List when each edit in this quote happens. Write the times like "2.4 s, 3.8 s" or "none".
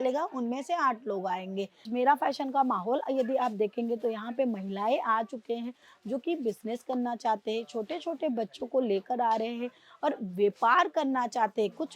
1.9 s